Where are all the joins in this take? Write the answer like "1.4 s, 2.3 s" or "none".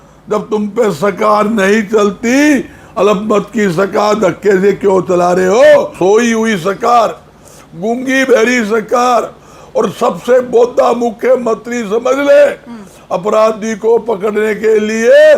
5.9 s